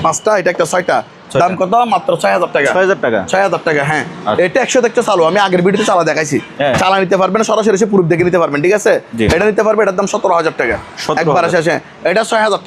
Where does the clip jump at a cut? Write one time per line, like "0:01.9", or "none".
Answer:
none